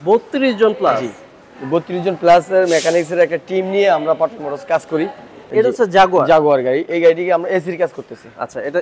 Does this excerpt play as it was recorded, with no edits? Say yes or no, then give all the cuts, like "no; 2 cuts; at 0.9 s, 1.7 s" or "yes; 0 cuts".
no; 1 cut; at 5.4 s